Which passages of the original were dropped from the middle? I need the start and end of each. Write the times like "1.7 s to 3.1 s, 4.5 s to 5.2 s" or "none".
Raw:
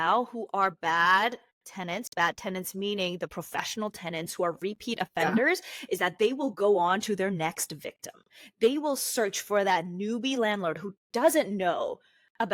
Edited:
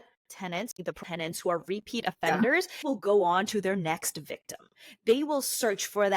2.1 s to 3.7 s, 5.8 s to 6.4 s

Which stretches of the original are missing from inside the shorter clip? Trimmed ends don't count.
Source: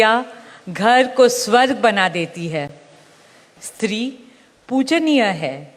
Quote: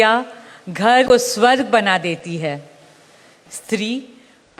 1.1 s to 1.2 s

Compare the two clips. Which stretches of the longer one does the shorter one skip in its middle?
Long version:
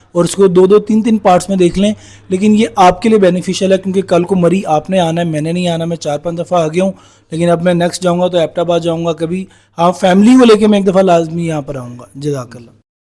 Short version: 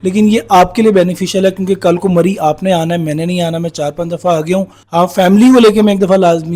7.0 s to 9.6 s

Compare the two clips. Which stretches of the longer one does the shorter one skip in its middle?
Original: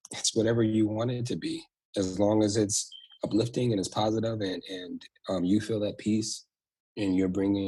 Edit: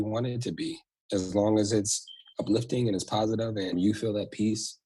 4.6 s to 5.4 s

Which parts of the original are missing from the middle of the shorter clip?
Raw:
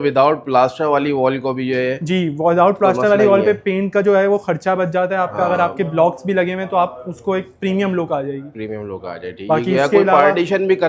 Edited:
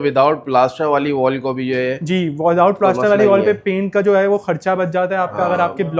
none

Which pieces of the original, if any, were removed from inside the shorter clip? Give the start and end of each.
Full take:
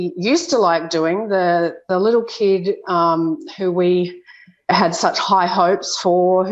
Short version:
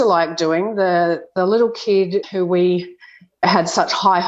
2.8 s to 3.5 s

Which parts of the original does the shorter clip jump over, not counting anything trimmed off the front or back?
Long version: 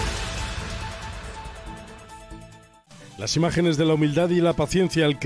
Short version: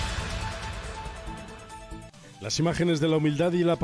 2.6 s to 2.9 s

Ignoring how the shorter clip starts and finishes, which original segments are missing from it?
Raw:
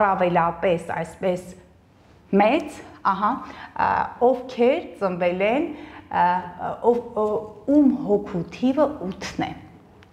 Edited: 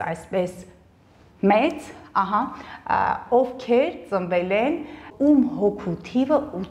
5.9 s to 7.5 s

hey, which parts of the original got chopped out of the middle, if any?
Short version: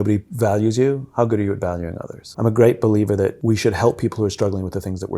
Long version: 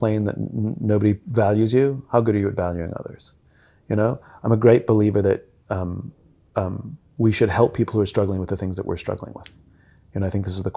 3.2 s to 4.3 s, 5.4 s to 7.1 s

